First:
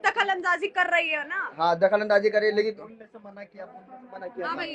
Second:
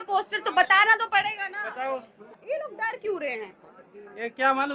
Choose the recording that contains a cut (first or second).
second